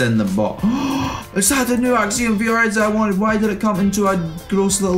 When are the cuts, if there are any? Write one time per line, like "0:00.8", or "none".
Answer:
none